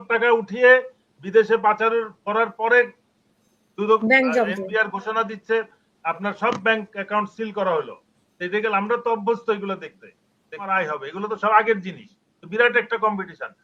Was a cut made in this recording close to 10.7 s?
yes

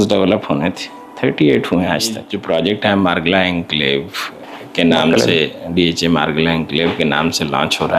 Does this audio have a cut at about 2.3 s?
yes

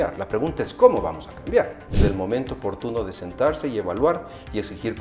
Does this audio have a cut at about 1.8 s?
yes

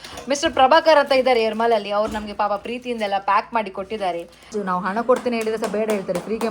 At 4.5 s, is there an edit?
yes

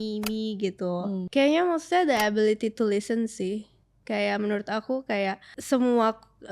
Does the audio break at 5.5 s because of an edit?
yes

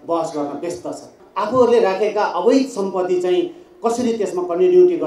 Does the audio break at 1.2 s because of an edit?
yes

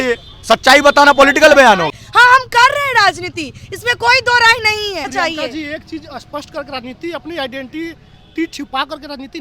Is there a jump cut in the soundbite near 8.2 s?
no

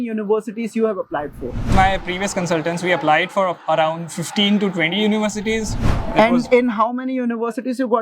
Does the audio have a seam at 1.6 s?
yes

